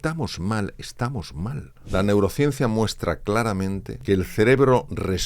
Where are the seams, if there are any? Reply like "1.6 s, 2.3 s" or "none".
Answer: 1.7 s, 3.9 s